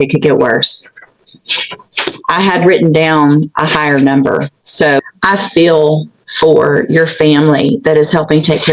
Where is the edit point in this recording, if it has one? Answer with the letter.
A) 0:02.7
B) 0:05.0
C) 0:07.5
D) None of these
B